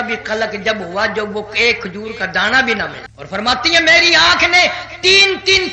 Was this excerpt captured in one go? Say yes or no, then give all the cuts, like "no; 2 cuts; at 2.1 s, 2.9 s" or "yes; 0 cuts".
no; 1 cut; at 3.1 s